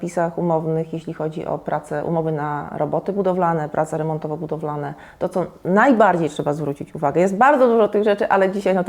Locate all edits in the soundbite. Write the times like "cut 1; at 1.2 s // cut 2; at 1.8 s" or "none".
none